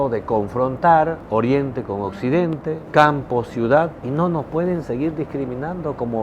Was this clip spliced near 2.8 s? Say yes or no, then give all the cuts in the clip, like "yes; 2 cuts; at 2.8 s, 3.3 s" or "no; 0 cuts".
yes; 3 cuts; at 1.2 s, 2.8 s, 4.0 s